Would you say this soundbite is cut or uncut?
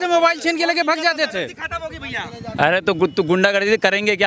uncut